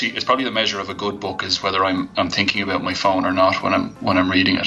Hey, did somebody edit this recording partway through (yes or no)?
no